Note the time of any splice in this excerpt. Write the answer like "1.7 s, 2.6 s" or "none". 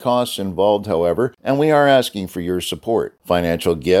1.4 s